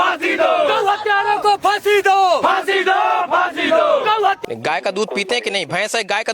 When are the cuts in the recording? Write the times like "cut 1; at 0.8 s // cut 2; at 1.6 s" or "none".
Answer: cut 1; at 4.5 s